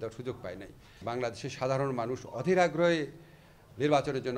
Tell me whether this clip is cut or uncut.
cut